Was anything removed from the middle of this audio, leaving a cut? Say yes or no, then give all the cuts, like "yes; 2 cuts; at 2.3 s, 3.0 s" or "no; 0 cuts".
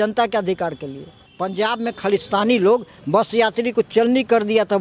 yes; 1 cut; at 1.2 s